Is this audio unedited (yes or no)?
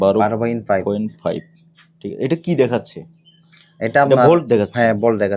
yes